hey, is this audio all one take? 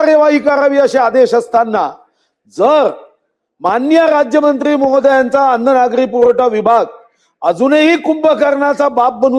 yes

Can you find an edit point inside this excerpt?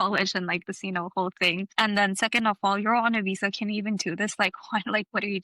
yes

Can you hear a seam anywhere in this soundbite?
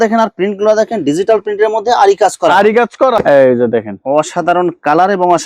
yes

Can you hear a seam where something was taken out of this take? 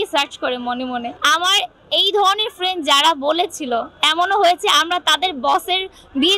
yes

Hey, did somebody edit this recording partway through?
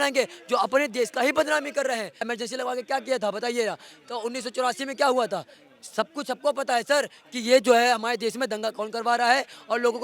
yes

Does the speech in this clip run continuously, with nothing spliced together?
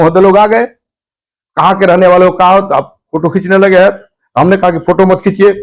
yes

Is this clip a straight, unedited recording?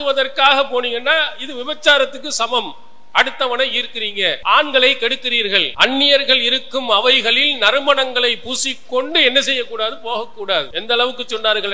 no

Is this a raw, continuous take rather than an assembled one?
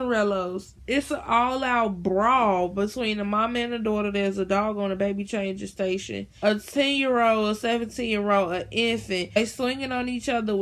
yes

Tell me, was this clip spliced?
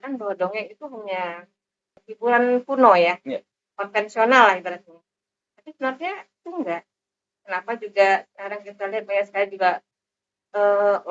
yes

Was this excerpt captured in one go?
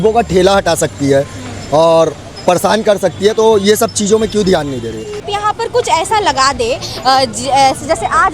no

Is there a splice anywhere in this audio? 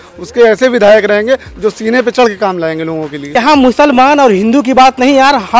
yes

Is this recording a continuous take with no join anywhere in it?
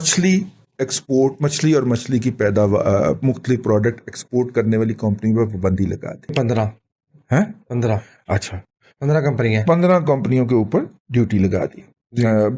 no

